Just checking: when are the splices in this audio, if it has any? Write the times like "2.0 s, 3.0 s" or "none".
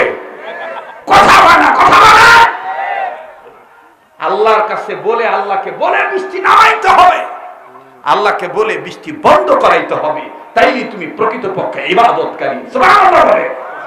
none